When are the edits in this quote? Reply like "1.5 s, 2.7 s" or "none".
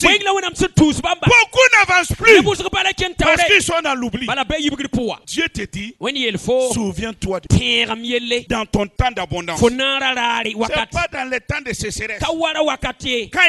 5.2 s, 7.4 s, 8.4 s